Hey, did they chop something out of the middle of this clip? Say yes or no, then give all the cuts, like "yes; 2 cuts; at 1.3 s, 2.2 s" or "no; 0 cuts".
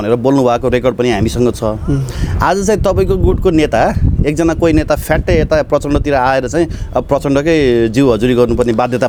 no; 0 cuts